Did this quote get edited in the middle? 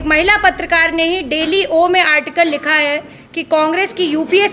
no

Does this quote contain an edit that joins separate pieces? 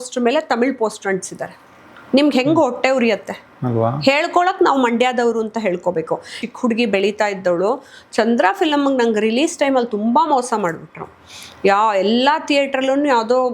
yes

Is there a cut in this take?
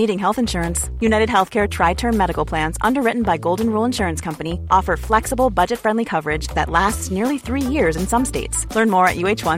no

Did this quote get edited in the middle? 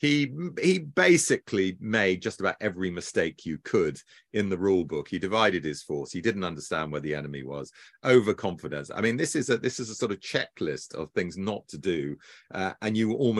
no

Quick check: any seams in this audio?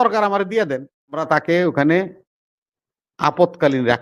yes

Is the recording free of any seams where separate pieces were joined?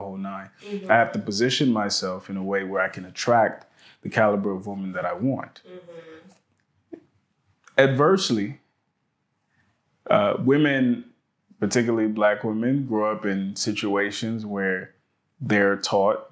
yes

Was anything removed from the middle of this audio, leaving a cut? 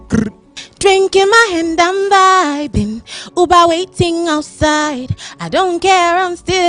no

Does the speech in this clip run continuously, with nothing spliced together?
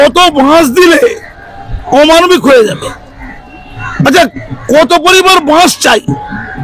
yes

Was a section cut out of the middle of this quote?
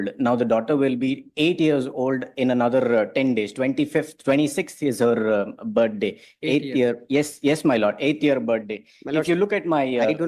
no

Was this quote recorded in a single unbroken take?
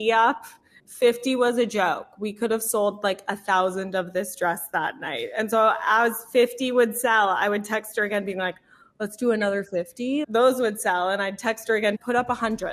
yes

